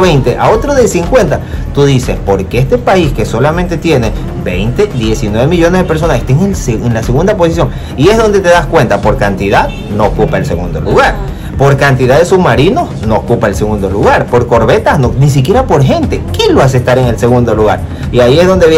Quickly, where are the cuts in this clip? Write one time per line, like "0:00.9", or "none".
none

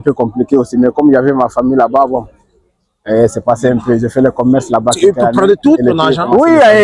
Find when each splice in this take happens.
0:05.0

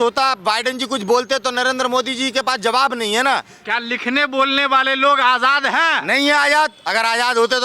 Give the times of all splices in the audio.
0:03.5

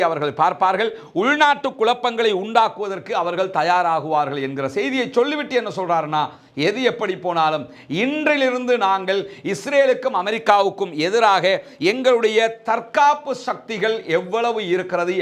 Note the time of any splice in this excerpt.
none

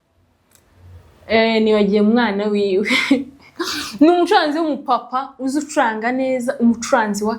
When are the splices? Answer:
none

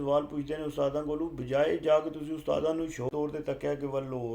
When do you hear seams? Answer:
0:03.2

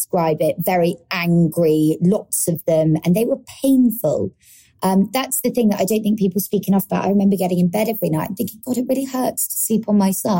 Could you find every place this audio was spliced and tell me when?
none

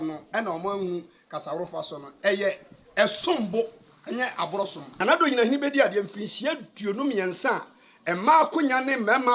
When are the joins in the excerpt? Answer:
0:04.8

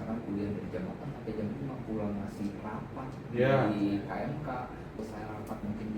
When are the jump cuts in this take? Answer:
0:05.0

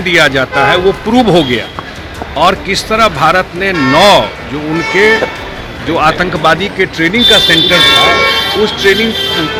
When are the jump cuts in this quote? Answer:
none

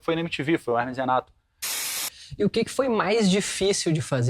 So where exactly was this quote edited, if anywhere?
0:01.9

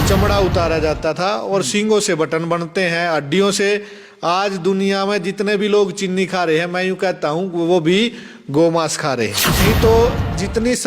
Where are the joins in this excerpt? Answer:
0:09.5

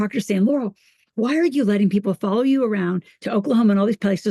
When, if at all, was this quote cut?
none

